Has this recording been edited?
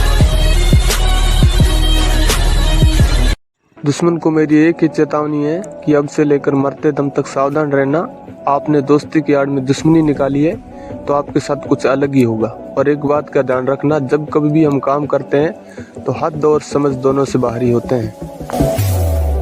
no; 0 cuts

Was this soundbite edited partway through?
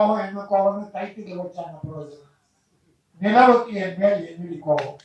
no; 0 cuts

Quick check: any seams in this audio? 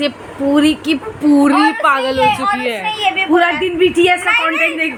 no; 0 cuts

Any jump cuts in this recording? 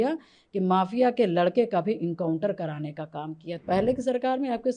yes; 1 cut; at 3.5 s

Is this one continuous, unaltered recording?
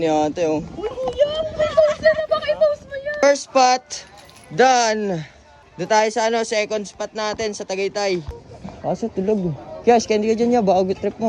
no; 2 cuts; at 3.2 s, 8.4 s

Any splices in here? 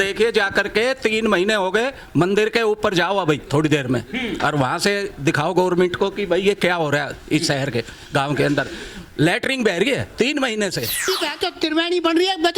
yes; 1 cut; at 11.0 s

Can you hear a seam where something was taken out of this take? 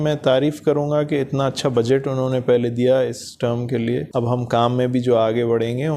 yes; 1 cut; at 4.1 s

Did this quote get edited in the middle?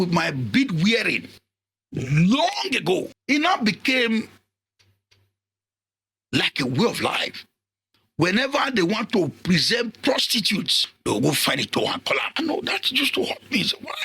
yes; 3 cuts; at 3.1 s, 10.9 s, 12.3 s

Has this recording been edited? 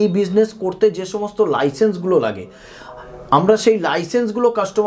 no; 0 cuts

